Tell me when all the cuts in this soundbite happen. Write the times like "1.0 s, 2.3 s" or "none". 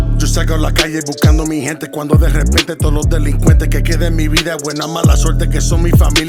none

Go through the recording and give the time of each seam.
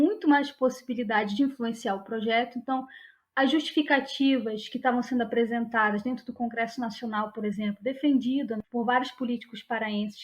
8.6 s

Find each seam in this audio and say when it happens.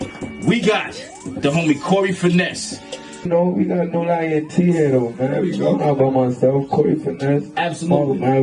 3.3 s

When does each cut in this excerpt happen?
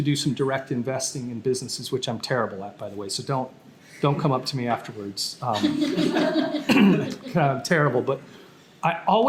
none

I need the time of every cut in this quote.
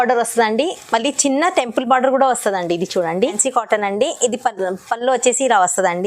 3.4 s

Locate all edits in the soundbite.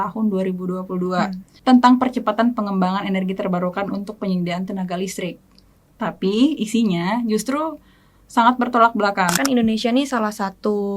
1.5 s, 9.3 s

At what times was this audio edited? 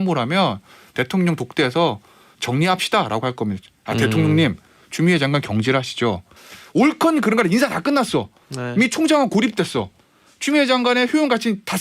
6.3 s

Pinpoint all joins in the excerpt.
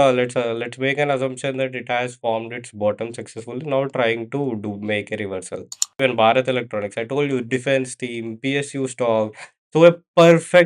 6.0 s

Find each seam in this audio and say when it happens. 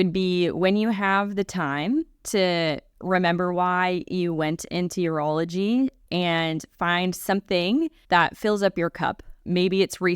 2.9 s, 6.0 s, 8.0 s

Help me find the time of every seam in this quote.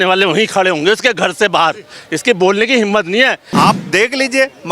3.4 s

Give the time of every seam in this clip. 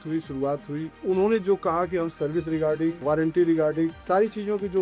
0.9 s, 3.0 s, 4.0 s

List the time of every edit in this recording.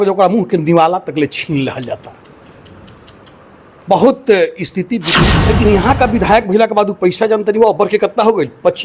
5.1 s

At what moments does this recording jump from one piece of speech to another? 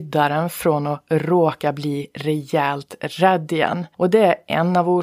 3.8 s

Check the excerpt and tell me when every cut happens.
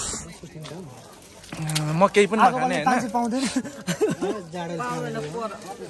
none

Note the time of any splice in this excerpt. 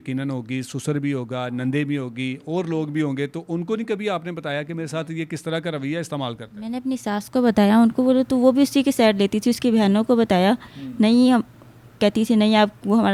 none

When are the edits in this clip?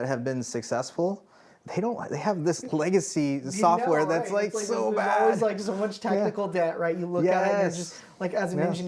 none

